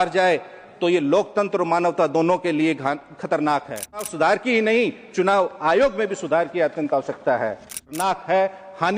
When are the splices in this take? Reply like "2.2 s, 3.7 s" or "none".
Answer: 4.1 s, 7.9 s

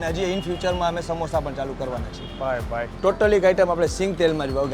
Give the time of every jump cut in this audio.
2.9 s

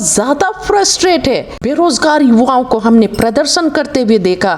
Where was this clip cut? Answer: 1.7 s

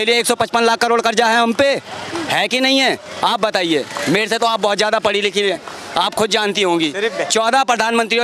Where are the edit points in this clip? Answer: none

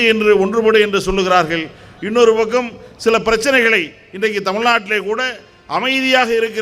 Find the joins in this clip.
none

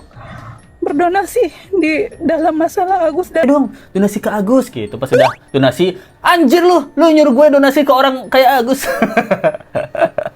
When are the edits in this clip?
3.4 s

